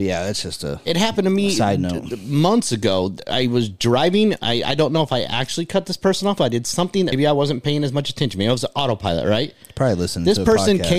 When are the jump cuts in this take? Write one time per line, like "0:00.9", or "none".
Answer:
0:07.1